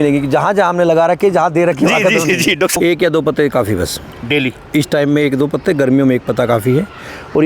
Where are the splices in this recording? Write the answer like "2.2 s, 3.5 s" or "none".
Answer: 2.8 s